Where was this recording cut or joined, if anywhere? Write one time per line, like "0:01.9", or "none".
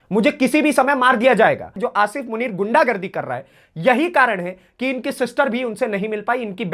0:01.8